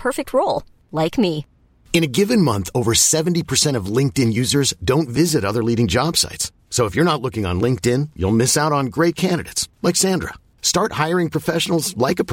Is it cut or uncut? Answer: uncut